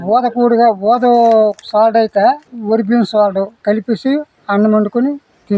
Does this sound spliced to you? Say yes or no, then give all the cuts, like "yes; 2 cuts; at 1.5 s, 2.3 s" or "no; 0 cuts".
yes; 2 cuts; at 2.4 s, 3.5 s